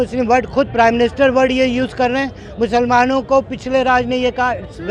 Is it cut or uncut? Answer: uncut